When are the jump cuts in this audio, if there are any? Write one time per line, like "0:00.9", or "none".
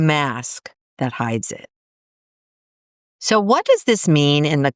none